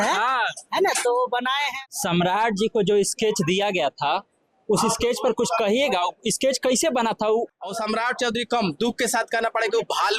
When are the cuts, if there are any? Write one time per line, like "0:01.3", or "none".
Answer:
0:01.7
0:07.5